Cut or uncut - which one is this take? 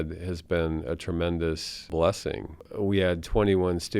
cut